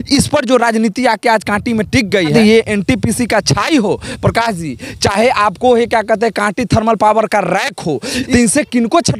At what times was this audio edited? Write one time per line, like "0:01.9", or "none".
0:02.3
0:08.2